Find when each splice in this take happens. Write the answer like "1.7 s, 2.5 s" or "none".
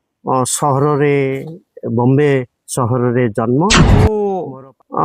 4.1 s